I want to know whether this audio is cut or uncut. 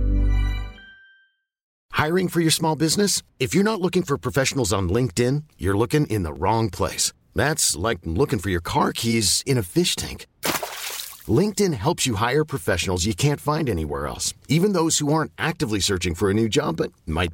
cut